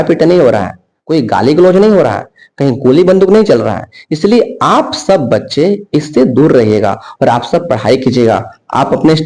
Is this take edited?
no; 0 cuts

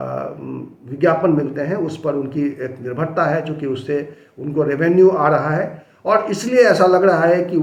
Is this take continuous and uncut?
yes; 0 cuts

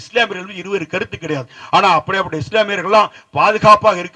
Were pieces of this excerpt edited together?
no; 0 cuts

